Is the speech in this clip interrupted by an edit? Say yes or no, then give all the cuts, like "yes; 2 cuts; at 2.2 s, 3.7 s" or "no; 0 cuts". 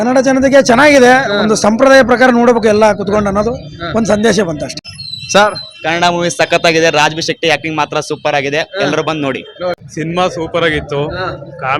yes; 2 cuts; at 4.8 s, 9.9 s